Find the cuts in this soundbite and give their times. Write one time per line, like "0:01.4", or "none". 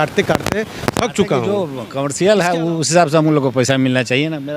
0:01.8